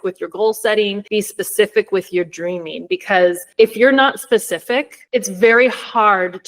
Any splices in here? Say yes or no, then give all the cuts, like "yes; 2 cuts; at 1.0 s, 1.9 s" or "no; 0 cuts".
yes; 3 cuts; at 1.0 s, 3.4 s, 5.0 s